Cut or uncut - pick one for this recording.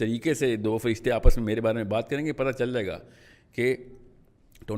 uncut